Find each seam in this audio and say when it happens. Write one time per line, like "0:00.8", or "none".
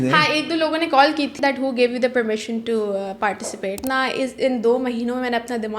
0:01.3
0:03.8